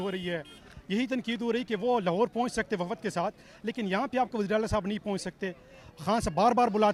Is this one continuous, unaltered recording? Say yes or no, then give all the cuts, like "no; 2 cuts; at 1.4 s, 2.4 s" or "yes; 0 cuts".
yes; 0 cuts